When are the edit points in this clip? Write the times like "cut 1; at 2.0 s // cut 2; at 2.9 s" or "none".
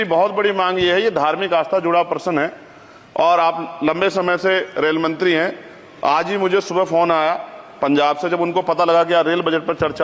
none